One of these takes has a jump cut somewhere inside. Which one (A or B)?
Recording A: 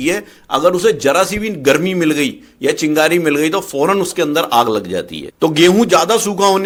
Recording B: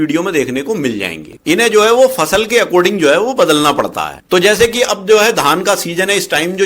B